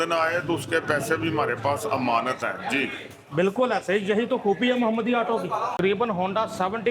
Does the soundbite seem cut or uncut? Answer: cut